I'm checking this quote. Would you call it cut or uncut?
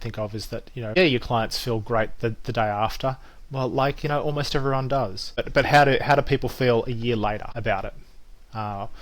cut